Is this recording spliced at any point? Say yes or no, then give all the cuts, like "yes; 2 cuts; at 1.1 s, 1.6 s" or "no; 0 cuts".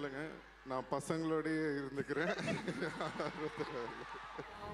no; 0 cuts